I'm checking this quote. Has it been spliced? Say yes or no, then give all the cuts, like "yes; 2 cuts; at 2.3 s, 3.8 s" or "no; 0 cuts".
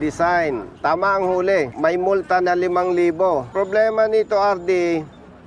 yes; 2 cuts; at 1.7 s, 3.5 s